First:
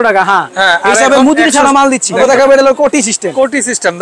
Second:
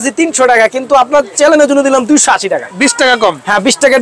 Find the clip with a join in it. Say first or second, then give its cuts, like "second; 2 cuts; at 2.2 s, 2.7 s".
first; 1 cut; at 2.2 s